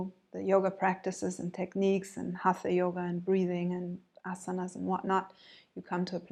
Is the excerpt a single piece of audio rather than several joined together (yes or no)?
yes